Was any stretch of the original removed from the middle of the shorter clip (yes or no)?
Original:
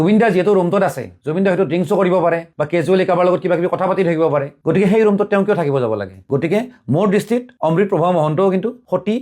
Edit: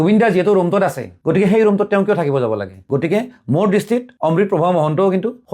yes